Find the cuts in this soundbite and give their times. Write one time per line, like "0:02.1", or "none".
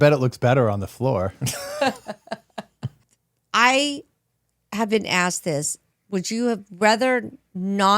0:03.0